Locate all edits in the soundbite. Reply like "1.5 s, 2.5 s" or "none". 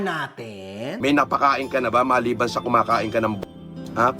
0.9 s